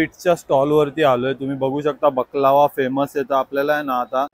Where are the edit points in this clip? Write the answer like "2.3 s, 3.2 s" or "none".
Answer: none